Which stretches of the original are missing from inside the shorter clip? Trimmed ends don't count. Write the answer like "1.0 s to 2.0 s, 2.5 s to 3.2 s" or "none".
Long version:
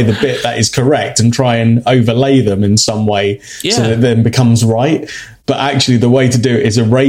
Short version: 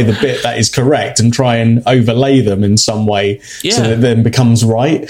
none